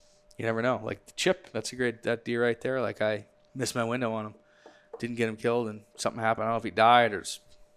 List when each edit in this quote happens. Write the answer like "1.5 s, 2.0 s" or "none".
3.4 s